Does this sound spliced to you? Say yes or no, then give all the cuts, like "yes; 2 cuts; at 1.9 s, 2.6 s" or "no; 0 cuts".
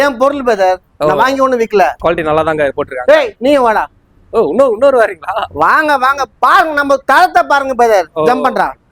yes; 1 cut; at 2.0 s